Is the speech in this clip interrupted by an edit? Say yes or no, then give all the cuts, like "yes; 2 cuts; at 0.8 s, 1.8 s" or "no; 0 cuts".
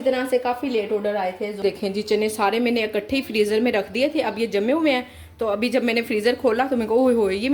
yes; 1 cut; at 1.5 s